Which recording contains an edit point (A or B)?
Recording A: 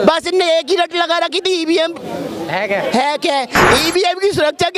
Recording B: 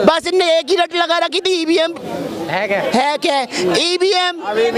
A